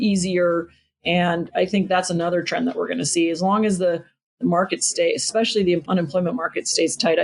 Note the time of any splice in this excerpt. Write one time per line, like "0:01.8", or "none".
0:05.8